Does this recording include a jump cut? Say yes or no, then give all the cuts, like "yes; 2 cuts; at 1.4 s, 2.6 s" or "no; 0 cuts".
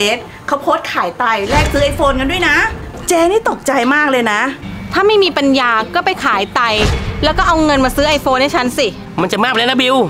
yes; 1 cut; at 4.6 s